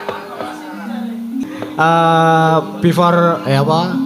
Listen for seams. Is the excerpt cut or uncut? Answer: cut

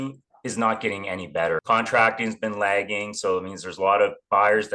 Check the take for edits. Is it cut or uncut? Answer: cut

